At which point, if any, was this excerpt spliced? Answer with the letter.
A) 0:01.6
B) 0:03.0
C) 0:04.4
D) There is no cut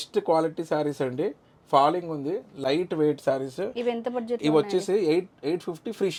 D